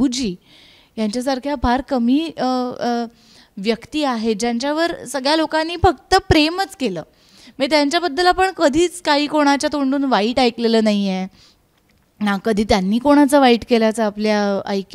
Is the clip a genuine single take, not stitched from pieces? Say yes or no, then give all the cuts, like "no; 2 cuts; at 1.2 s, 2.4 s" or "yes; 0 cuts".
yes; 0 cuts